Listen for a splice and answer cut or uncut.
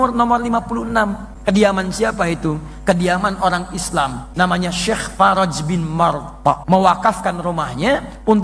cut